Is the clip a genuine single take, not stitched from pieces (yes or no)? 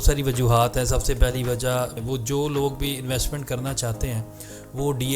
no